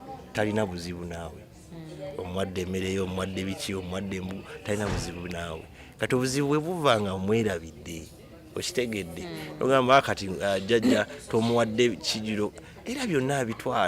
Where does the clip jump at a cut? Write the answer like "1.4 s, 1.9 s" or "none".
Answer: none